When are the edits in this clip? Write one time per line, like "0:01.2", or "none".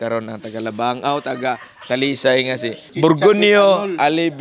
0:02.8